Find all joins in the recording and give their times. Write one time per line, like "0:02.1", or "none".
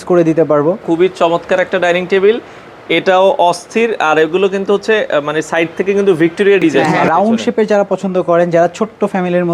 0:00.8
0:06.9